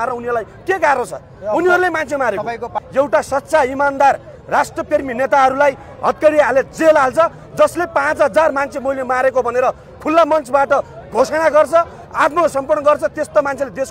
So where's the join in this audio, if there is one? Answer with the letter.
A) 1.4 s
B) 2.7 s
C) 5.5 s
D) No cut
B